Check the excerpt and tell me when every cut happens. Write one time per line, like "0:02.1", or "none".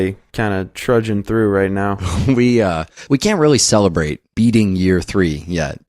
0:02.9